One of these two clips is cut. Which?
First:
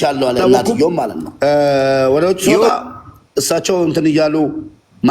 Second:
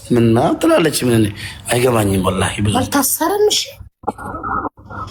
first; 1 cut; at 1.2 s

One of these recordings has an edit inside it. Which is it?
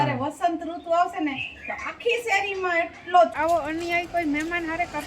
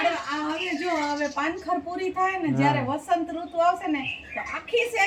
first; 1 cut; at 3.3 s

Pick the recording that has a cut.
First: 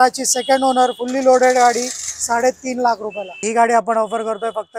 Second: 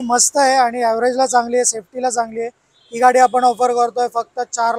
first; 1 cut; at 3.3 s

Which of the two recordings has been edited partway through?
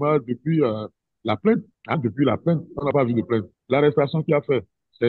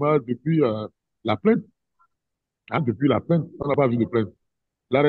first; 2 cuts; at 1.7 s, 3.5 s

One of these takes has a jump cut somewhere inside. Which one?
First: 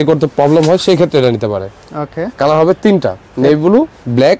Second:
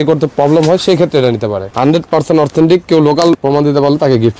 second; 2 cuts; at 1.6 s, 3.4 s

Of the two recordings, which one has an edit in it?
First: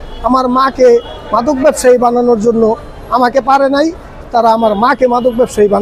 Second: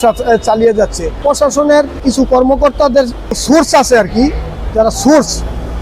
second; 3 cuts; at 1.2 s, 2.0 s, 3.4 s

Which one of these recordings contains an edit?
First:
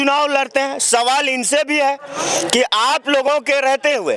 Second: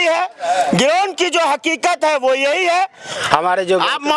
second; 1 cut; at 3.1 s

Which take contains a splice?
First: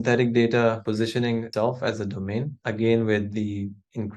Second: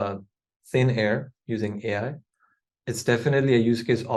first; 2 cuts; at 0.9 s, 2.5 s

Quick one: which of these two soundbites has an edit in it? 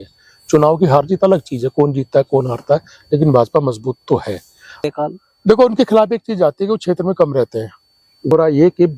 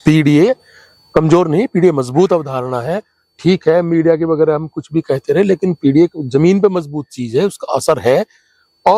first; 2 cuts; at 4.8 s, 8.3 s

